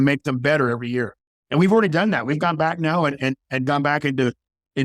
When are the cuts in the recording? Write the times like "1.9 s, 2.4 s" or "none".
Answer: 1.2 s